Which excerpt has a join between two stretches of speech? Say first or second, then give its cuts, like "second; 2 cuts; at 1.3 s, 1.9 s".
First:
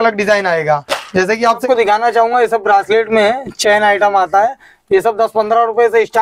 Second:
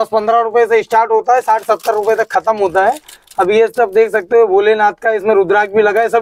first; 1 cut; at 1.6 s